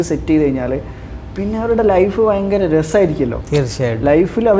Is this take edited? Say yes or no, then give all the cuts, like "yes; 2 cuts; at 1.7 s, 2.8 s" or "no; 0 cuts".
no; 0 cuts